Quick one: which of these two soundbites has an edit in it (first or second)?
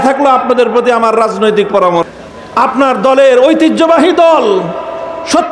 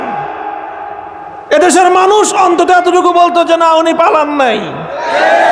first